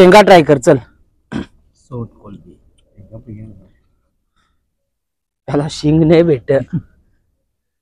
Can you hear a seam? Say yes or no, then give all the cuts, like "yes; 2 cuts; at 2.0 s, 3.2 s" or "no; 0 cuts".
no; 0 cuts